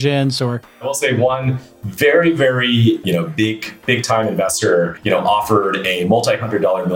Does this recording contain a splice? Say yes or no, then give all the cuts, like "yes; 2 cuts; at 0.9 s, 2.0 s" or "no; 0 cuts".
yes; 3 cuts; at 0.9 s, 3.0 s, 5.0 s